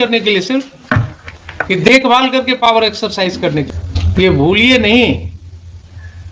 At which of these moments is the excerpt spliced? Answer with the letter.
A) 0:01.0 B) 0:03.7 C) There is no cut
B